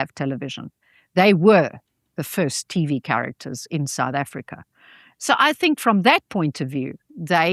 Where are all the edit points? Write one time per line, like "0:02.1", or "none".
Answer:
none